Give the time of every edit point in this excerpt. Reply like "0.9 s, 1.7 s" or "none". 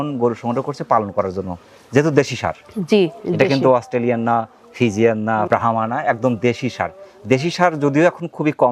none